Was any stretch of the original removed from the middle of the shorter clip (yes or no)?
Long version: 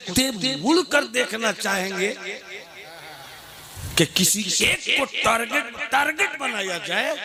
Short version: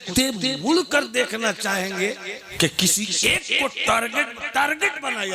yes